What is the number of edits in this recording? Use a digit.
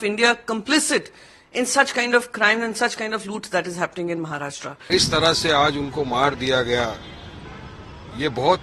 1